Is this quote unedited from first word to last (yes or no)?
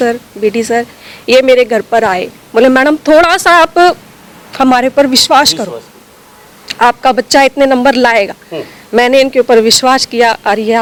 yes